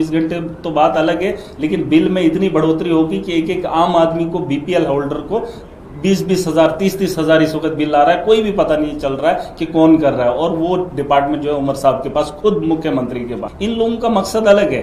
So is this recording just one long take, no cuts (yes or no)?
no